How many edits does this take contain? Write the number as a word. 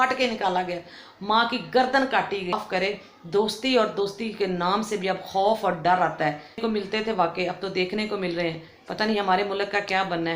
two